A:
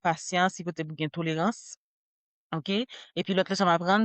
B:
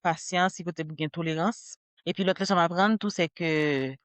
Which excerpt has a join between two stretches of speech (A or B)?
B